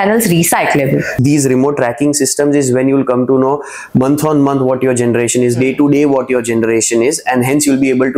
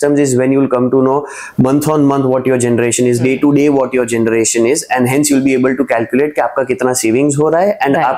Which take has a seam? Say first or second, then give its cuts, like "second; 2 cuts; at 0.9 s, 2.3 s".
first; 1 cut; at 1.1 s